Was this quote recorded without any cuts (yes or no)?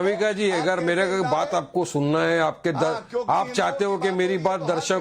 no